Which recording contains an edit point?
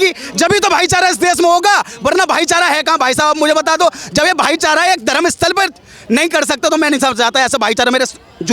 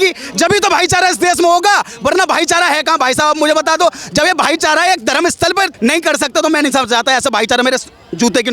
second; 1 cut; at 5.7 s

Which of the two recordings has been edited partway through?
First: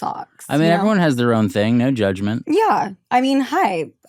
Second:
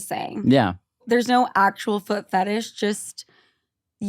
second; 1 cut; at 1.0 s

